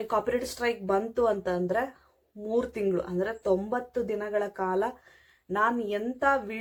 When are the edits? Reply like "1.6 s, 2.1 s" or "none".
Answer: none